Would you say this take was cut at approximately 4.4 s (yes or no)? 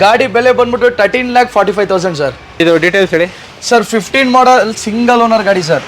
no